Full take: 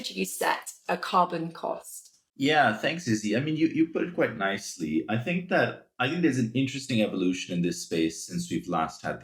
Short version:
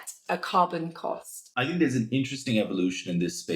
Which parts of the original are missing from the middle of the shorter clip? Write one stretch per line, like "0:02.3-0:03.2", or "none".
0:02.0-0:05.9